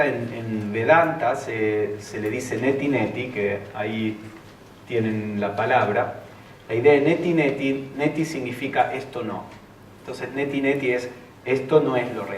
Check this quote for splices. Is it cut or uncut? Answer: cut